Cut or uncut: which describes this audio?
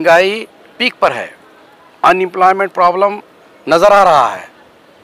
uncut